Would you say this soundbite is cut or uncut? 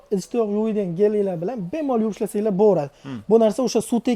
uncut